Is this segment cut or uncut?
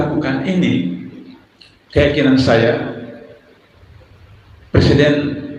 uncut